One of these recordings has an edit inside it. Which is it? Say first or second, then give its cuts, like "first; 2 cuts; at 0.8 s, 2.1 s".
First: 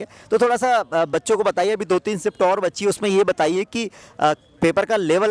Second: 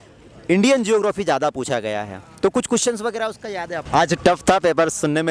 second; 1 cut; at 3.7 s